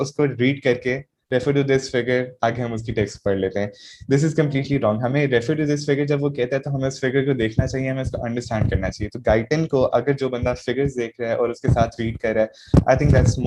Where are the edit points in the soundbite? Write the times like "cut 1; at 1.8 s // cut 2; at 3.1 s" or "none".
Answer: none